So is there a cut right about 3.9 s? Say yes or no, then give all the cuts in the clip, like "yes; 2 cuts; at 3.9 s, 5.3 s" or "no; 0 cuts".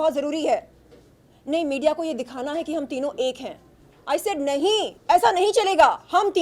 no; 0 cuts